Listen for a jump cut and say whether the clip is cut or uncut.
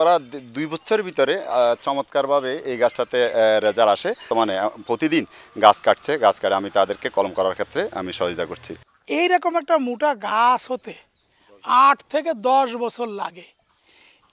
cut